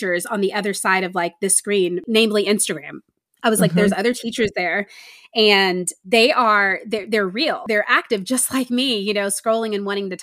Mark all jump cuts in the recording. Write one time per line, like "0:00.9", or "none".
0:02.0
0:05.9
0:07.6